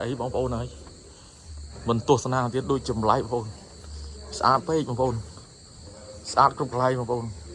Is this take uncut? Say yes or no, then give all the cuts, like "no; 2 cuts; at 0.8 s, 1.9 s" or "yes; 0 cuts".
yes; 0 cuts